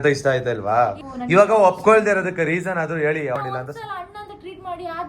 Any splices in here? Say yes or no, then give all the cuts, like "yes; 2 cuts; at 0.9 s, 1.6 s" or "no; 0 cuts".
yes; 2 cuts; at 1.0 s, 3.4 s